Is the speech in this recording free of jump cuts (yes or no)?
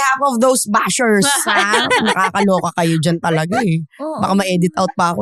yes